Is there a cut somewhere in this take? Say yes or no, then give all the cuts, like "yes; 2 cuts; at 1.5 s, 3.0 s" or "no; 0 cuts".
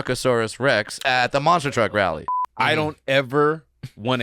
yes; 2 cuts; at 1.0 s, 2.2 s